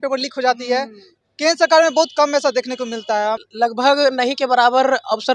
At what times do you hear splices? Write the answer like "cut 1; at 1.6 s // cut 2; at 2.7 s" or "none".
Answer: cut 1; at 3.5 s